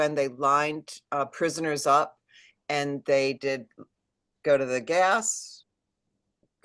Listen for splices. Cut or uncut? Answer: uncut